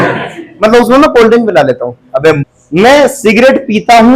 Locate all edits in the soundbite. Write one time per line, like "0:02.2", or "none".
0:02.4